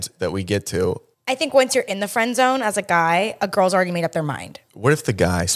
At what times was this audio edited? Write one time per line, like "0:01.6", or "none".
0:01.1
0:04.6